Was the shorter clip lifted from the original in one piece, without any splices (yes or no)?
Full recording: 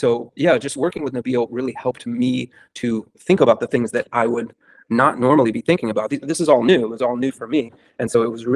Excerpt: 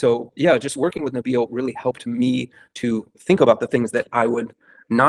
yes